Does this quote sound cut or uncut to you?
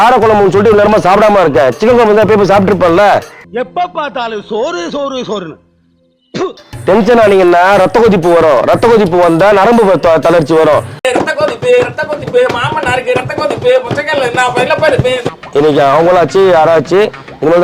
cut